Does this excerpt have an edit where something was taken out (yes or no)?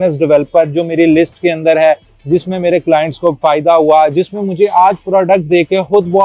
no